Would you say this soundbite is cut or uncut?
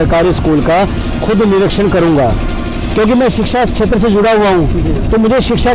uncut